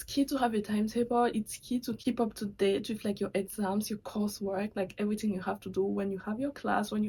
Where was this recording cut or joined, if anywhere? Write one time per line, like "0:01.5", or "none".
none